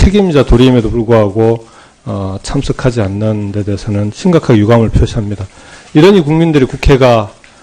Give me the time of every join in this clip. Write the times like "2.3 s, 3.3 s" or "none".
none